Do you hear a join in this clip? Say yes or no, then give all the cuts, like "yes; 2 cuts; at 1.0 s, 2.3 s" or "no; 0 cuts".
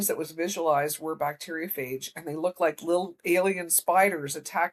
no; 0 cuts